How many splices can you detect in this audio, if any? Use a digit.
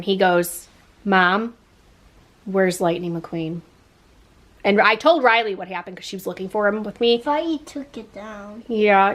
0